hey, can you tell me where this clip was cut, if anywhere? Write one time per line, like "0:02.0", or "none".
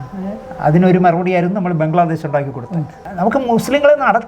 0:03.0